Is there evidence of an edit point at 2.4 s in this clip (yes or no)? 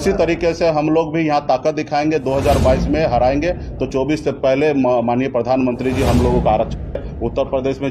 no